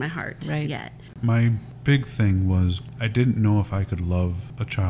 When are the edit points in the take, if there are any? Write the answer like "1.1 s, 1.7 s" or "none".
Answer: 1.1 s